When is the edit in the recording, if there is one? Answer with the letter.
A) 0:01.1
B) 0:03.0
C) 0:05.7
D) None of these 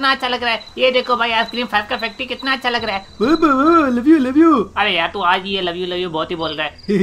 D